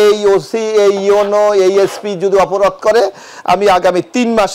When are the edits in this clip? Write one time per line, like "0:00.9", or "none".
none